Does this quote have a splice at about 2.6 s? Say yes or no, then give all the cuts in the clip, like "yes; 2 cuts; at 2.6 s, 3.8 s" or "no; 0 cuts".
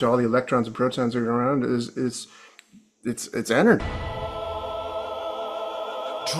no; 1 cut; at 3.9 s